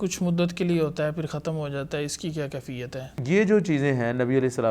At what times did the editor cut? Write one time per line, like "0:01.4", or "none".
0:03.2